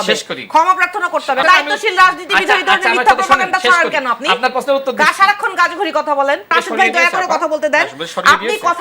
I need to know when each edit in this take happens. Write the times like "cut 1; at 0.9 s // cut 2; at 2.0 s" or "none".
cut 1; at 1.4 s // cut 2; at 6.5 s